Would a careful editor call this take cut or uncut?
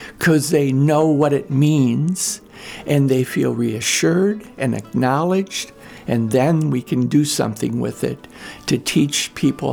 uncut